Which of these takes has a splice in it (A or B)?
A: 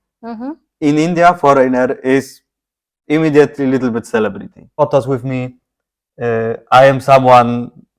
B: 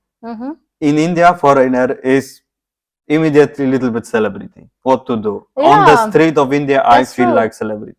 A